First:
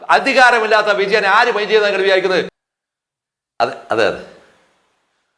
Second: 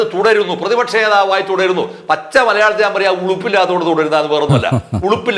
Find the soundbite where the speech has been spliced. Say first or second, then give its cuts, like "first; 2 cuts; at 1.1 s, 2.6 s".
first; 1 cut; at 2.6 s